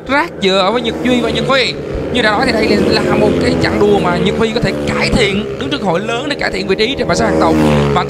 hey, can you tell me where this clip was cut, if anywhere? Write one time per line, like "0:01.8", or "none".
none